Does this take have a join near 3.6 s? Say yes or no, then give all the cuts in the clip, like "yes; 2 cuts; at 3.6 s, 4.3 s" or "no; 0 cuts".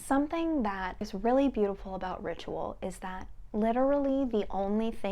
no; 1 cut; at 1.1 s